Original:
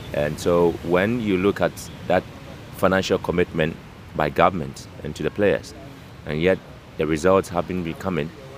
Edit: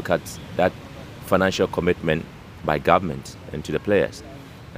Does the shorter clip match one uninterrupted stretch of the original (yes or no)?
yes